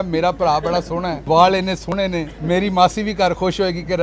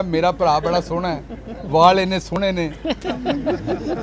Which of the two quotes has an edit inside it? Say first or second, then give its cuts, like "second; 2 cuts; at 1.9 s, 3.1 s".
first; 2 cuts; at 1.2 s, 2.3 s